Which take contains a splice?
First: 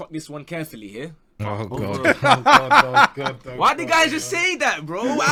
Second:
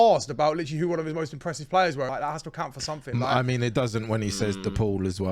second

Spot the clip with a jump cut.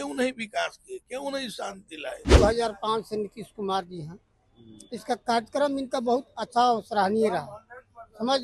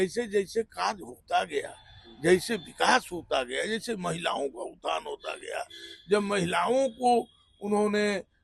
first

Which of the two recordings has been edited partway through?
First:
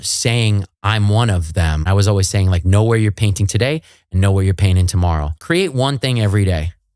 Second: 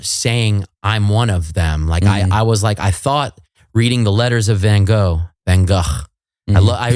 first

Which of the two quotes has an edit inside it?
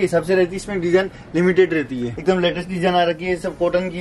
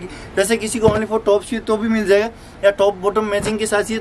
first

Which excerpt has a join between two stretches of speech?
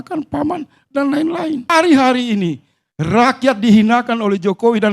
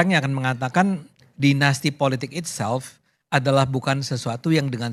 first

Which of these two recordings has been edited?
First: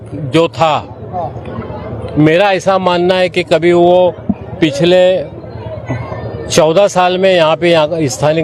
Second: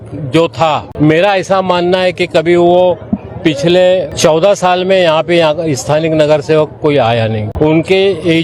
second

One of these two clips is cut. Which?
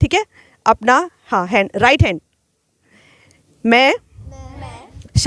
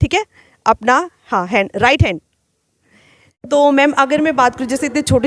second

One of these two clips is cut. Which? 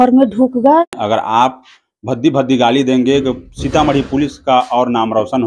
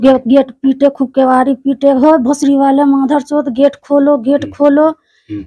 first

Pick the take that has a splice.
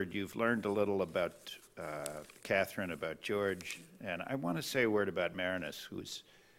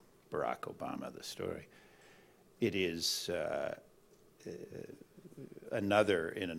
first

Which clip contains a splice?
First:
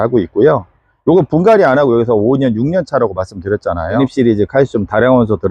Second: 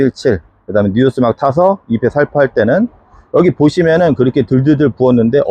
first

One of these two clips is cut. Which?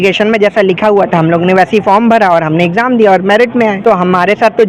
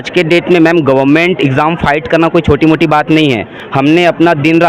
first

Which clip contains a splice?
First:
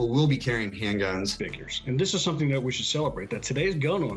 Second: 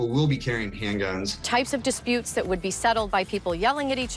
first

